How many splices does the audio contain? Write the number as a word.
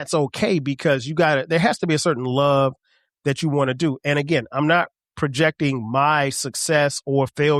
zero